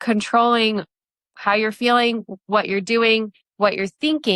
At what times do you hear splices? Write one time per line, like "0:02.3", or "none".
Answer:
0:03.4